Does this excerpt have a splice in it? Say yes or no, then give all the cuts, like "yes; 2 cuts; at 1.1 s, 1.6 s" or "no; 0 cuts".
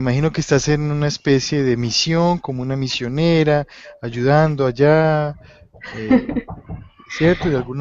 no; 0 cuts